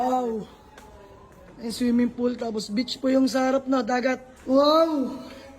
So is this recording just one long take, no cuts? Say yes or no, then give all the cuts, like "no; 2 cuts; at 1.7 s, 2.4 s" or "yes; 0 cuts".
no; 1 cut; at 4.3 s